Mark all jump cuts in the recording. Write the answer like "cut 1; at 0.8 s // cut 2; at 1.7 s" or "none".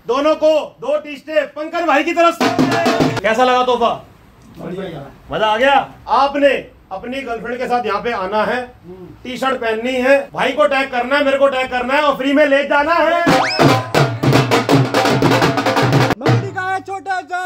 cut 1; at 3.2 s // cut 2; at 6.0 s // cut 3; at 10.3 s // cut 4; at 16.1 s